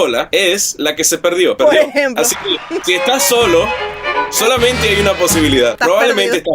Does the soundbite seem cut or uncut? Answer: cut